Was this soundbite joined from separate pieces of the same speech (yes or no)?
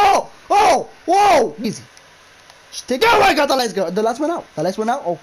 yes